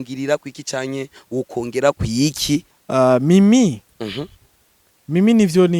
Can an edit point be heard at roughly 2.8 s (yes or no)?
yes